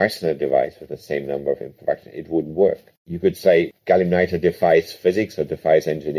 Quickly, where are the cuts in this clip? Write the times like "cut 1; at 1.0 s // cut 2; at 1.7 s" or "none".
none